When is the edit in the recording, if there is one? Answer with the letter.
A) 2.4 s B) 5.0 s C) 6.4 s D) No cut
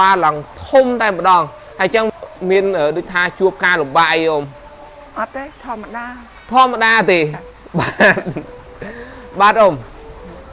B